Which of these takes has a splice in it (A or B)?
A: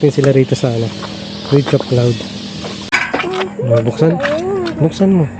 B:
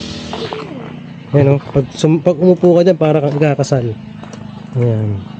A